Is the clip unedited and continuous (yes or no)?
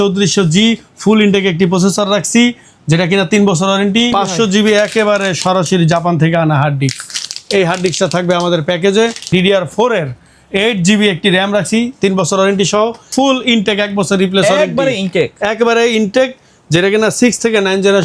no